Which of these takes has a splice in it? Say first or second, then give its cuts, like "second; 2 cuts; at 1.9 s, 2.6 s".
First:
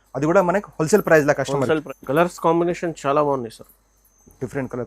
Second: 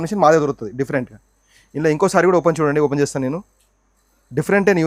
first; 1 cut; at 1.8 s